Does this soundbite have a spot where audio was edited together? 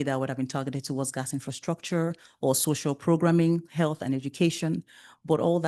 no; 0 cuts

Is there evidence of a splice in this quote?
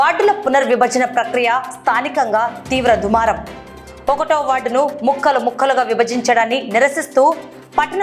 no; 0 cuts

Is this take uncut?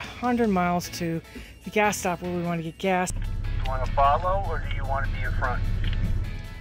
no; 1 cut; at 3.2 s

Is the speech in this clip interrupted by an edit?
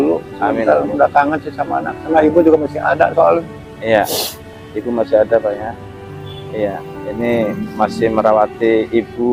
no; 0 cuts

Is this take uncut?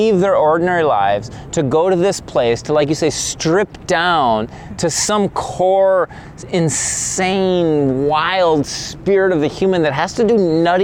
yes; 0 cuts

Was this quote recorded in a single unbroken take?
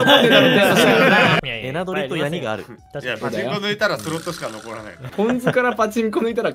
no; 2 cuts; at 1.4 s, 5.0 s

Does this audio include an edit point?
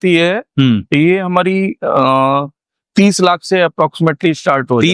no; 0 cuts

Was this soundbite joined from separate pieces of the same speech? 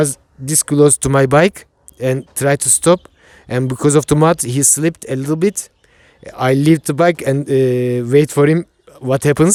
no; 0 cuts

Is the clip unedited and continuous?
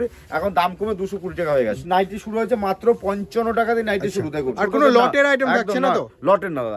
no; 2 cuts; at 1.8 s, 4.5 s

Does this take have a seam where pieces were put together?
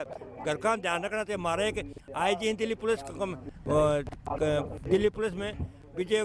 no; 0 cuts

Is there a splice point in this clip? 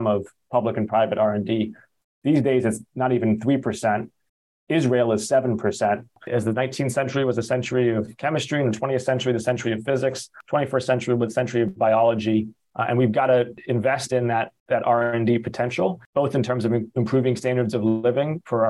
yes; 6 cuts; at 6.2 s, 10.3 s, 12.6 s, 13.6 s, 14.6 s, 16.0 s

